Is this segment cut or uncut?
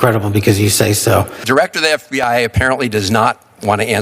cut